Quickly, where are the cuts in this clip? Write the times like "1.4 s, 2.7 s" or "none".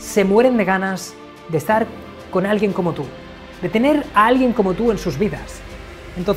none